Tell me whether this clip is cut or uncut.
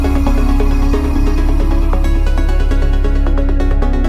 uncut